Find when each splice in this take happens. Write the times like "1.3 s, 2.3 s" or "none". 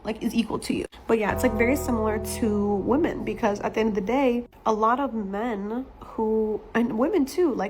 none